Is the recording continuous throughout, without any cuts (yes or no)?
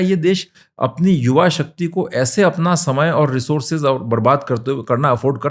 yes